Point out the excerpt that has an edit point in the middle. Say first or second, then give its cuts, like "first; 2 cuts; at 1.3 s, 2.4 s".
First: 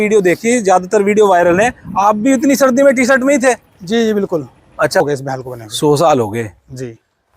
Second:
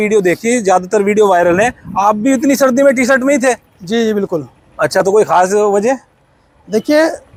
first; 1 cut; at 5.0 s